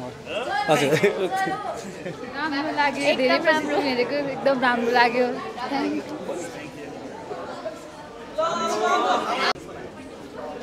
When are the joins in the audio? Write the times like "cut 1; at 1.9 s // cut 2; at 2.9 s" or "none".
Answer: none